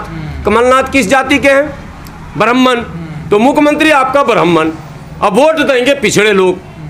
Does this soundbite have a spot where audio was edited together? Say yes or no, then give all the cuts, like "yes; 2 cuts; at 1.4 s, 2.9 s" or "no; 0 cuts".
no; 0 cuts